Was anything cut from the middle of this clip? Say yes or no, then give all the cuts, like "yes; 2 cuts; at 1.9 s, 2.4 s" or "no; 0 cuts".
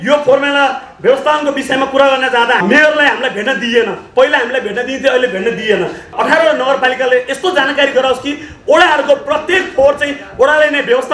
yes; 2 cuts; at 2.6 s, 6.1 s